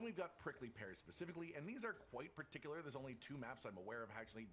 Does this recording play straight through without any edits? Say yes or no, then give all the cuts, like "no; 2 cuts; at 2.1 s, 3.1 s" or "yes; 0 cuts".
yes; 0 cuts